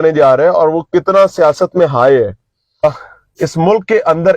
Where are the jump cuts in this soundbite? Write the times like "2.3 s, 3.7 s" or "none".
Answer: 2.8 s